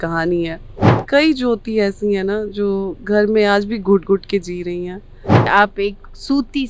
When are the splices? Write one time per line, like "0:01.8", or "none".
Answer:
0:01.0
0:05.5